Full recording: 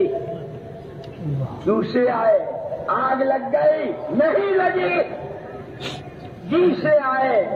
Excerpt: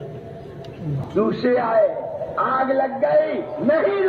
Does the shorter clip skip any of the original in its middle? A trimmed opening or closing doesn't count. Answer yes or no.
yes